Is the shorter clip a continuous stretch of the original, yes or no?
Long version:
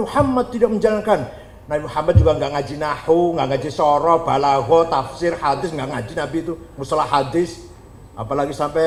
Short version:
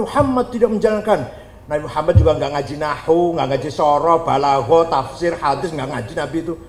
yes